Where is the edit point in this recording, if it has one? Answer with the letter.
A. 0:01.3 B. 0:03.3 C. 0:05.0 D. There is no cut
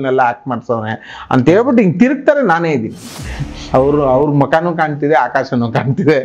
B